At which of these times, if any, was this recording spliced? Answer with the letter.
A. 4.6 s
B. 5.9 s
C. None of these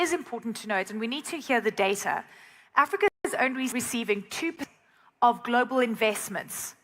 A